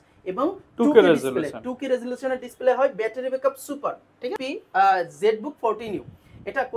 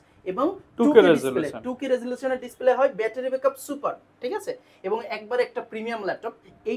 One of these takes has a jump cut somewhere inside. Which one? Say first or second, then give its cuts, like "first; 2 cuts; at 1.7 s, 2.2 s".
first; 1 cut; at 4.4 s